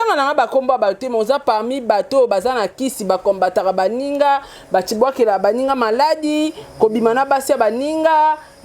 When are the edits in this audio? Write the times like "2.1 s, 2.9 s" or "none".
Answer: none